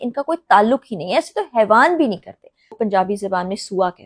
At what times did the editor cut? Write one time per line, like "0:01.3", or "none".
0:02.7